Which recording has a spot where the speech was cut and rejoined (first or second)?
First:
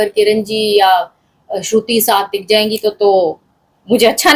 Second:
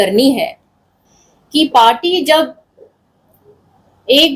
second